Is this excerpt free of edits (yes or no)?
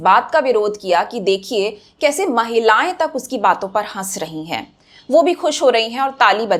yes